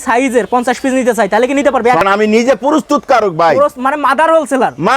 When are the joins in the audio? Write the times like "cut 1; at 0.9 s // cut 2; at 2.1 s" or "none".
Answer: cut 1; at 2.0 s